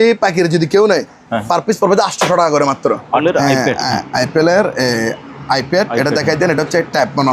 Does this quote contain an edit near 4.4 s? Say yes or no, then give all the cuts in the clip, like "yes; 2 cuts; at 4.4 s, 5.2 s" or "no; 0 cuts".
no; 1 cut; at 3.2 s